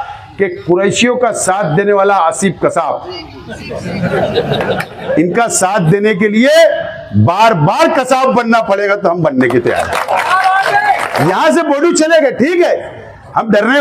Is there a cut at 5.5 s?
no; 1 cut; at 11.2 s

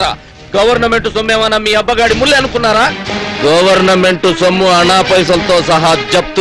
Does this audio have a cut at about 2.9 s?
yes; 1 cut; at 2.9 s

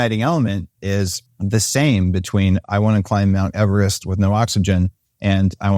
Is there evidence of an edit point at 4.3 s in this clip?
no; 1 cut; at 1.2 s

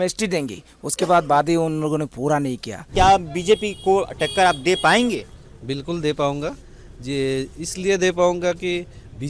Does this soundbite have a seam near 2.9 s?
yes; 1 cut; at 2.9 s

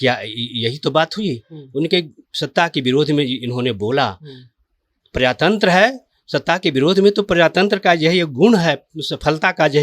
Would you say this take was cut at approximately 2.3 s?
no; 0 cuts

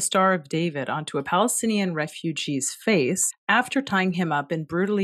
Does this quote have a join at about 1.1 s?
no; 1 cut; at 3.3 s

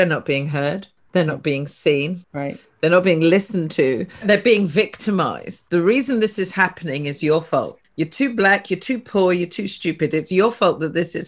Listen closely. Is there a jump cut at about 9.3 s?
no; 4 cuts; at 0.9 s, 2.2 s, 4.2 s, 7.8 s

